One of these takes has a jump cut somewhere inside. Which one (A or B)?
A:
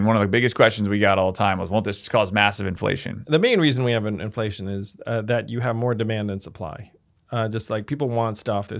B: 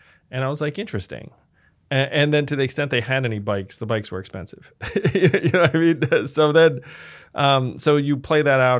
A